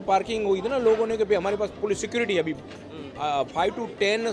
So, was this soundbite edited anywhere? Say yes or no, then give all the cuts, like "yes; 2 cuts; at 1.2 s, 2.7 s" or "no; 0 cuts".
no; 0 cuts